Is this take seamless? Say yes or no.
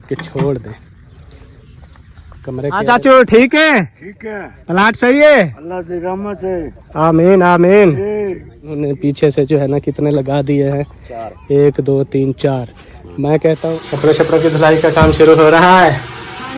no